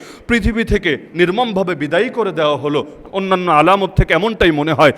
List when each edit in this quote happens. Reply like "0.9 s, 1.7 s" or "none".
3.0 s